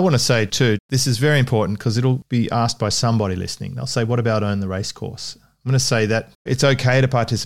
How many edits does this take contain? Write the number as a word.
three